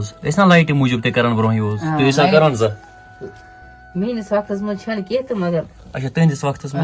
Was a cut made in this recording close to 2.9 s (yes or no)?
no